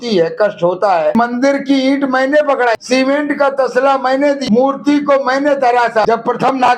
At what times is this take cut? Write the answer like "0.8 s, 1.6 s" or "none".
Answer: 1.1 s, 2.8 s, 4.4 s, 6.0 s